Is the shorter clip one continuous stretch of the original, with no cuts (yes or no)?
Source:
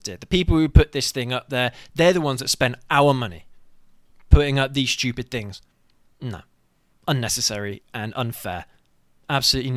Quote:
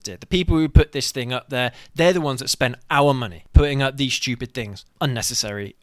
no